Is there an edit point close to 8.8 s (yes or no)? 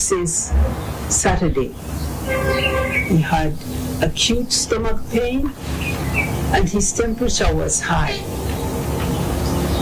no